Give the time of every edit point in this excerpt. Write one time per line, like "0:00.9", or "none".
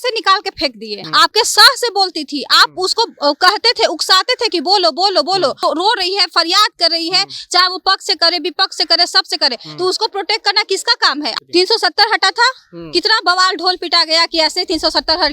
0:00.9
0:05.6
0:11.3